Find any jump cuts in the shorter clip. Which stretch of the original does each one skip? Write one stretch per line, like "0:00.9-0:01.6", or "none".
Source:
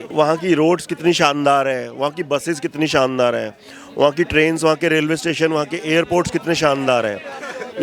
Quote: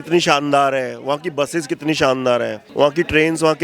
0:03.5-0:03.8

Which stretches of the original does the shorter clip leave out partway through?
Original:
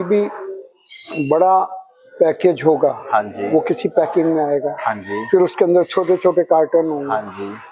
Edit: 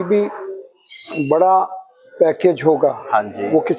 none

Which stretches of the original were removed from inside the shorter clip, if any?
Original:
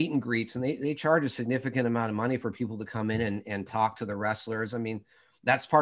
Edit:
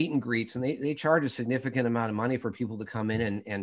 none

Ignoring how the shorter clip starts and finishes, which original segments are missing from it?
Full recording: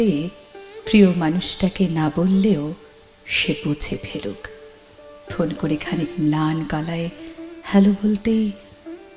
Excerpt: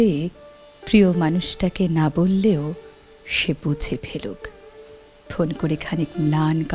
none

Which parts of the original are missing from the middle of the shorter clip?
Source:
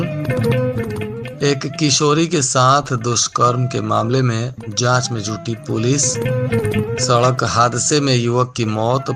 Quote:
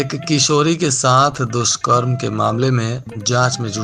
none

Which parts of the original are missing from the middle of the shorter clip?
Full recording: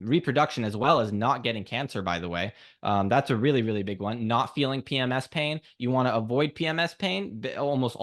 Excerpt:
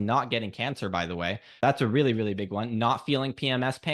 0:02.7-0:03.1

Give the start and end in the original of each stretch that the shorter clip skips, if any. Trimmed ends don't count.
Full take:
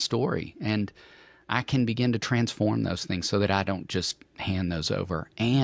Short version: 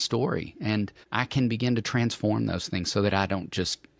0:01.0-0:01.4

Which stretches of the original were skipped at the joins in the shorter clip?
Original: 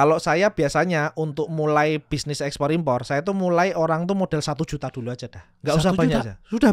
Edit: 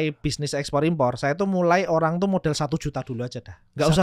none

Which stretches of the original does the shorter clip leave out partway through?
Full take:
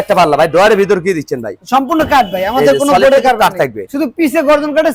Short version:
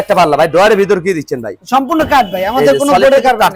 none

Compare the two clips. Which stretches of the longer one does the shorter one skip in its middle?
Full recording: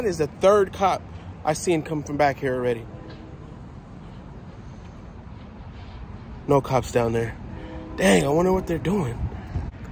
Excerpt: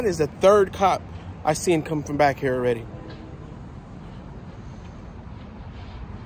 none

